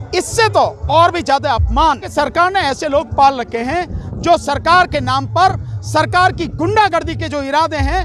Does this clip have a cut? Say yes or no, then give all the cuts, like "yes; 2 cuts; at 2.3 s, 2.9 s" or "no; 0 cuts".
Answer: yes; 1 cut; at 2.1 s